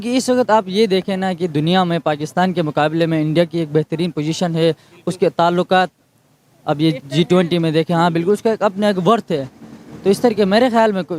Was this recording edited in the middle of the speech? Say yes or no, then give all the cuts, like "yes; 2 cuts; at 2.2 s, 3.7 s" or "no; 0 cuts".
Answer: no; 0 cuts